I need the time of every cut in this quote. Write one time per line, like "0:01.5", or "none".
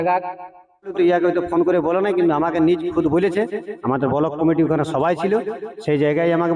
0:00.9